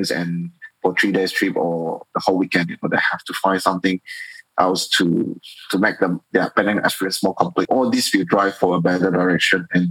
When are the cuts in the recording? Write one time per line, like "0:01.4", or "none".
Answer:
0:07.7

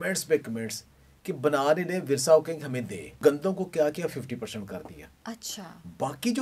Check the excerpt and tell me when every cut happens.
0:03.1

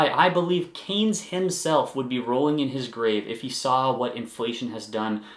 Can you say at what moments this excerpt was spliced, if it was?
none

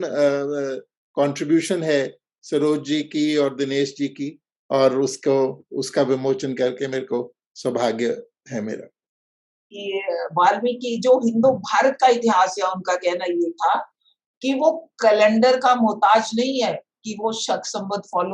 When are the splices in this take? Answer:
0:09.8

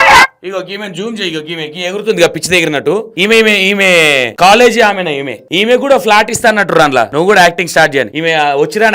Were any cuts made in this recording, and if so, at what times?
0:03.1
0:04.3
0:05.4
0:07.1
0:08.1

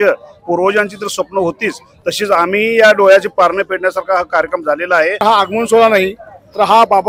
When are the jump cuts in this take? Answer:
0:05.2

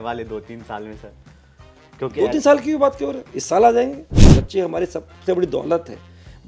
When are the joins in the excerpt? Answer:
0:04.2

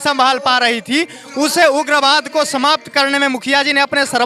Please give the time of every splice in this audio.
none

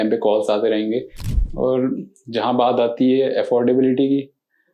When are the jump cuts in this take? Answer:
0:01.2

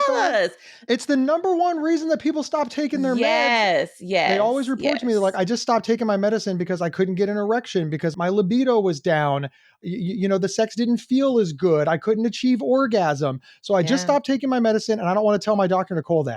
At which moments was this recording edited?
0:04.3
0:08.1
0:09.8

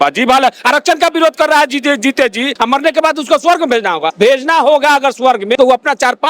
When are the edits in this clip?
0:02.5
0:04.1
0:05.5

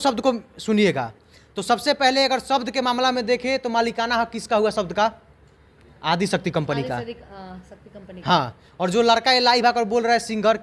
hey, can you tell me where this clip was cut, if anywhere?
none

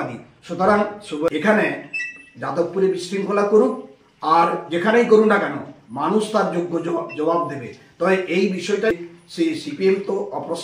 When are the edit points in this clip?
0:01.3
0:08.9

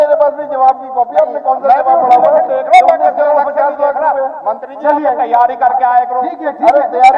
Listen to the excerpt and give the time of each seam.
none

